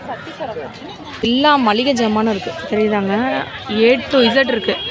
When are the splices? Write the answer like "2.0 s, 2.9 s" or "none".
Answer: 1.2 s